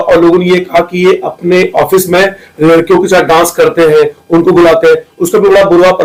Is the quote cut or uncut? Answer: uncut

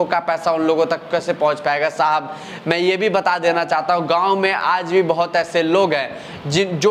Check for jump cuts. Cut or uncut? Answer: uncut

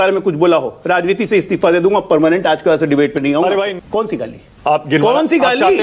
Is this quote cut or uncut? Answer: cut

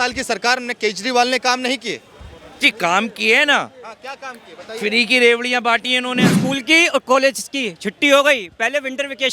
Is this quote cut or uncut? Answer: cut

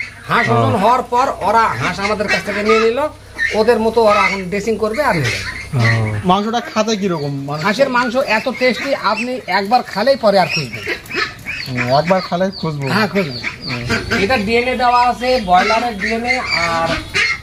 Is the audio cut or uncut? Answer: cut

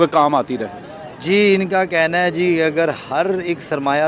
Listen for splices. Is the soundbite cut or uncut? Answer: uncut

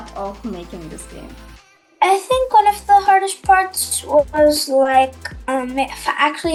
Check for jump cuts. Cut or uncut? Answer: uncut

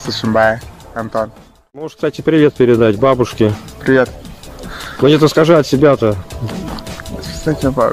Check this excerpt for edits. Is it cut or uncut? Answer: cut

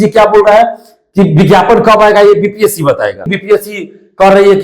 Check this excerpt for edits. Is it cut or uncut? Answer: cut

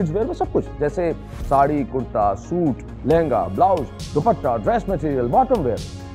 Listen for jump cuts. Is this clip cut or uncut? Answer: uncut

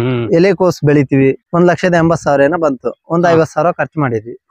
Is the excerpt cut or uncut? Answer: cut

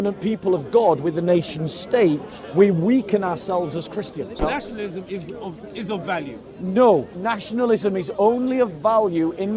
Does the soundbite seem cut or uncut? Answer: cut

